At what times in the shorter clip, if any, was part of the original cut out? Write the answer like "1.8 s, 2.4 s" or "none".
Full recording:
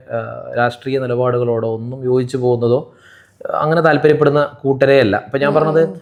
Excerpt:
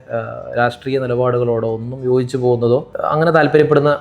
2.9 s